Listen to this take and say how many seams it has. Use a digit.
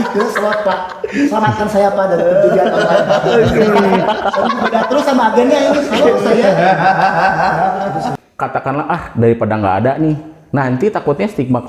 1